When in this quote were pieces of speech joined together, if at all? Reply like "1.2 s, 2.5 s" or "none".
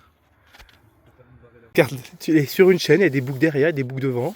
1.8 s

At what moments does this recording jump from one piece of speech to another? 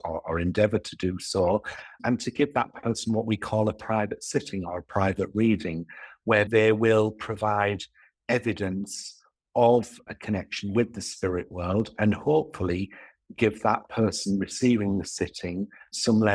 2.0 s, 6.5 s

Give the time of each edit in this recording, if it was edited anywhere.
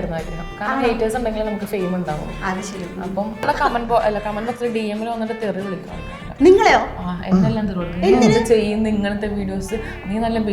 3.5 s

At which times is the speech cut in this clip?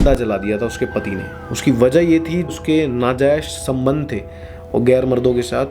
2.5 s

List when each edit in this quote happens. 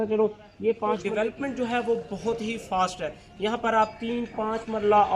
1.0 s

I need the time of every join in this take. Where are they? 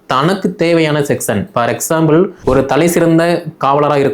2.4 s

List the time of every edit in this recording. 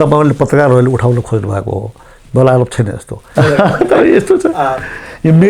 3.2 s

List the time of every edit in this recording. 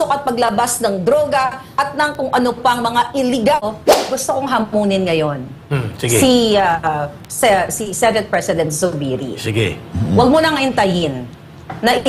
3.6 s

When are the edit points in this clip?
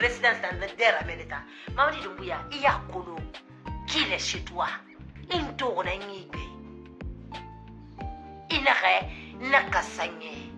6.3 s, 8.5 s

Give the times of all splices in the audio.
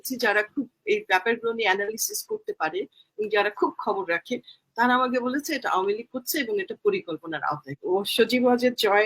7.8 s

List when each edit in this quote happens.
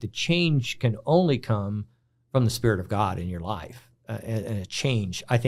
none

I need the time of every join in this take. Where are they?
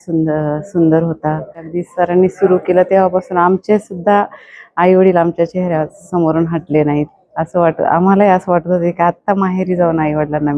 1.7 s

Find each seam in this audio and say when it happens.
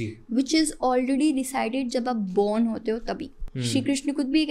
3.5 s

